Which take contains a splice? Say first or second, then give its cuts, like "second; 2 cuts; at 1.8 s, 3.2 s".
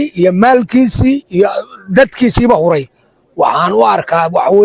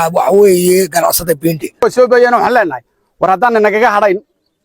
second; 1 cut; at 1.8 s